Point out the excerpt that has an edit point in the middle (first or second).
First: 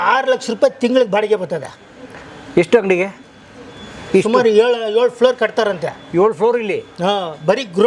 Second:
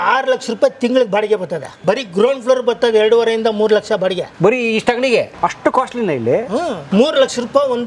second